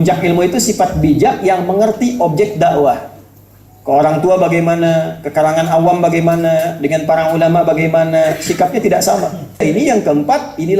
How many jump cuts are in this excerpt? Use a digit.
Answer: 1